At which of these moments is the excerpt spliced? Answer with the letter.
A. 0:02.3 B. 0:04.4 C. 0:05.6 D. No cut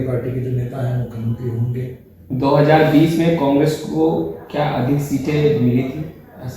A